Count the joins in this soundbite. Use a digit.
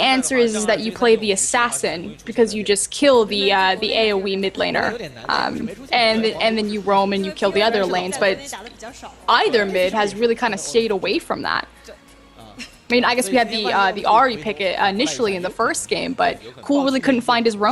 0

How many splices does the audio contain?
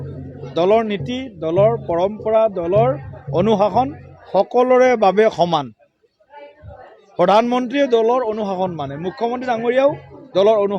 0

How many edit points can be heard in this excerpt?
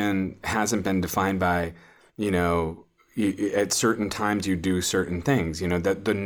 0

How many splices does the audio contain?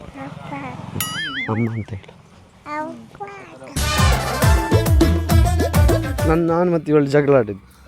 2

